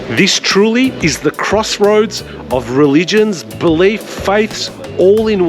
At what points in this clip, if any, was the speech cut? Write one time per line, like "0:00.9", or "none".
0:01.0
0:04.1